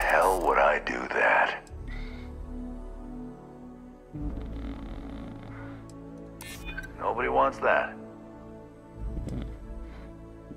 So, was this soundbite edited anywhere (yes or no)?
no